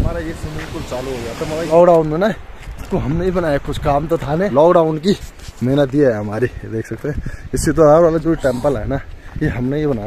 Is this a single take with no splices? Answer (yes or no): no